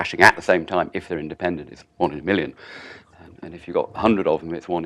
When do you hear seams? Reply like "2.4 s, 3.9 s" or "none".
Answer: 3.9 s